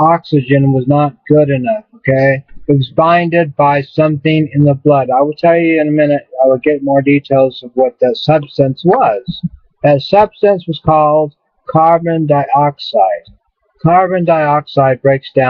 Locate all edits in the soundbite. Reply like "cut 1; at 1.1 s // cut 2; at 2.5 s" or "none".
cut 1; at 8.7 s